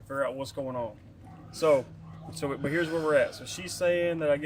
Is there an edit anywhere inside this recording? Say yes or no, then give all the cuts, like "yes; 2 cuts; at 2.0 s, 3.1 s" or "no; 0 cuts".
no; 0 cuts